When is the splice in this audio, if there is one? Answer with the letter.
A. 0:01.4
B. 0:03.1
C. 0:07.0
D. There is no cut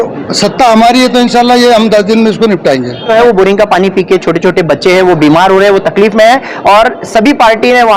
B